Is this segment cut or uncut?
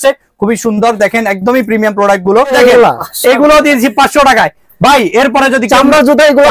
cut